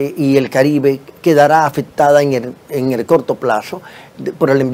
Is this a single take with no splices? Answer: yes; 0 cuts

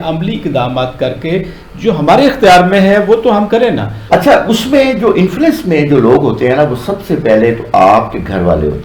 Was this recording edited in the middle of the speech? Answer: yes; 1 cut; at 3.9 s

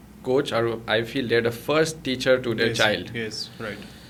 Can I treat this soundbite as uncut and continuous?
yes; 0 cuts

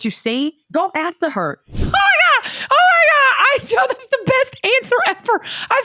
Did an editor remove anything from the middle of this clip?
yes; 1 cut; at 1.9 s

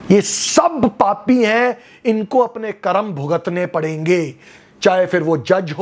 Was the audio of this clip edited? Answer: no; 0 cuts

